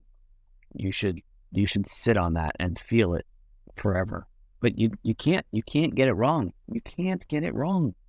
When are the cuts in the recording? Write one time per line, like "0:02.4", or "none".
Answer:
none